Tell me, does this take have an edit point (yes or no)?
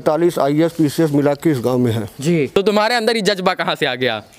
yes